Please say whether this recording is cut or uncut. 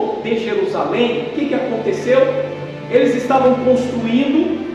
uncut